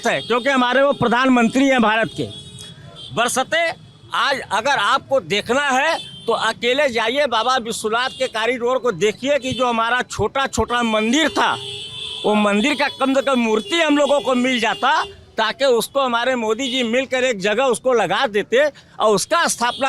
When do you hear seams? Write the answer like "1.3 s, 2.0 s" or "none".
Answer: none